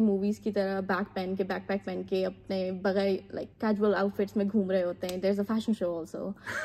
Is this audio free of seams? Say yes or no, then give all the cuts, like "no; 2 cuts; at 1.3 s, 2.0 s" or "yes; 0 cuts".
yes; 0 cuts